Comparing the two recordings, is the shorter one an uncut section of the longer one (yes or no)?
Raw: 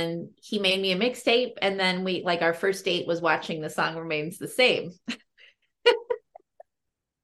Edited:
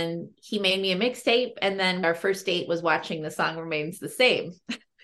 no